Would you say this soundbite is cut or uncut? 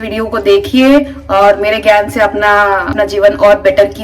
cut